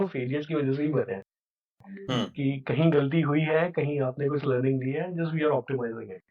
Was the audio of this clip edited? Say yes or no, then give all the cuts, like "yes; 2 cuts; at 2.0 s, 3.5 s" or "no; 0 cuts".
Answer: no; 0 cuts